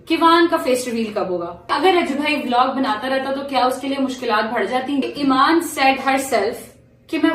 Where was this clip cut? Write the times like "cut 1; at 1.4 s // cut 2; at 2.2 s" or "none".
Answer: cut 1; at 1.7 s // cut 2; at 5.0 s